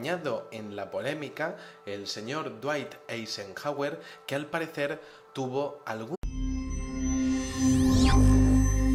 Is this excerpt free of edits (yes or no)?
yes